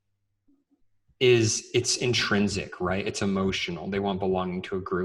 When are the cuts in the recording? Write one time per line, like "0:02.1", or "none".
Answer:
none